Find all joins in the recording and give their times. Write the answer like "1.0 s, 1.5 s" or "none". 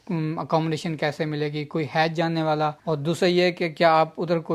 none